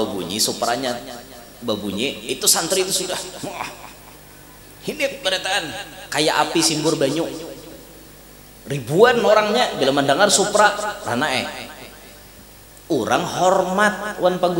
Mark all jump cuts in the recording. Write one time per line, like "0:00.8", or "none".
none